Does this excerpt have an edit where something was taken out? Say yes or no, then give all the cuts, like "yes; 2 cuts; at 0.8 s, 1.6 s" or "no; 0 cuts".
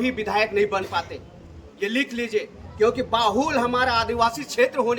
no; 0 cuts